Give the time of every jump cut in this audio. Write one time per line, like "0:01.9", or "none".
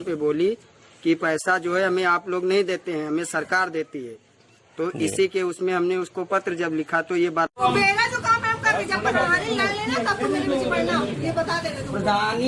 0:07.6